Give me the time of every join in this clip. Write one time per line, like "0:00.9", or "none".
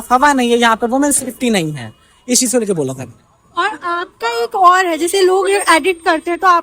none